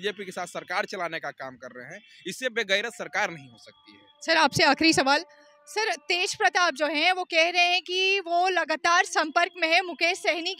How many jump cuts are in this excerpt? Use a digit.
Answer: 0